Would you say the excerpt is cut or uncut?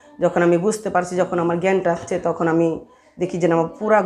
uncut